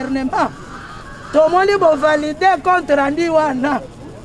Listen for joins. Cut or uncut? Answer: uncut